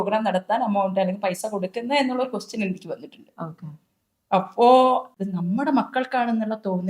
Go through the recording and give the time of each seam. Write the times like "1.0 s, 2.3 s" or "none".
5.1 s